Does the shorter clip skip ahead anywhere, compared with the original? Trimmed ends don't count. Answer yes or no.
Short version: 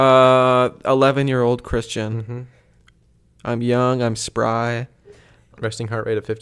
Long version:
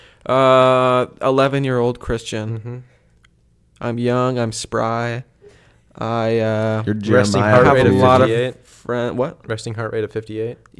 yes